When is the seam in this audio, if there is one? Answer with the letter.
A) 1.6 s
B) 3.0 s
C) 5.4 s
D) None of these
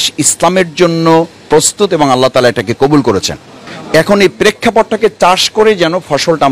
D